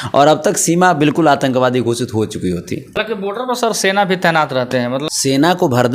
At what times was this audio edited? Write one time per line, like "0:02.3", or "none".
0:02.9
0:05.0